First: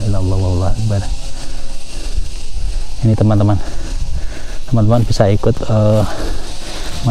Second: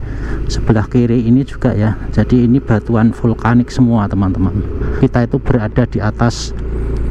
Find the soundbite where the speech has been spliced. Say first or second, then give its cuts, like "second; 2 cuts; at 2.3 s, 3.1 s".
second; 1 cut; at 4.9 s